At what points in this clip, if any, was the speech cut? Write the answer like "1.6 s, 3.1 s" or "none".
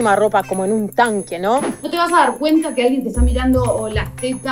1.8 s